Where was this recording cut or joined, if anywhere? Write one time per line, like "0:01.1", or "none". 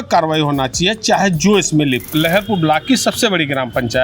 0:02.1